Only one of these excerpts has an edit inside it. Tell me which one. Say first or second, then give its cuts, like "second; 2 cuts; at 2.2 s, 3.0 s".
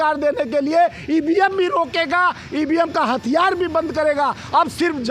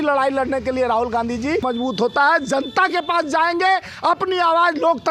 second; 1 cut; at 1.6 s